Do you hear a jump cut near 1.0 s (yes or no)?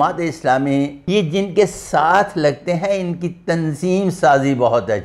yes